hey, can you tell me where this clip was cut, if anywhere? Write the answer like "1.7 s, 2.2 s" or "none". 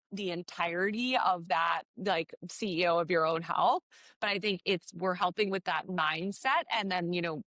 none